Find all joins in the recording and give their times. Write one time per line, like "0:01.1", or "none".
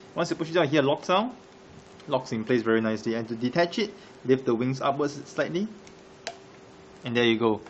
0:05.7